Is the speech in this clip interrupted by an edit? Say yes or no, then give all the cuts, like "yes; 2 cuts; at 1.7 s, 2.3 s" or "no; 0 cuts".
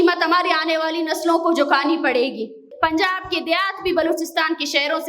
yes; 1 cut; at 2.7 s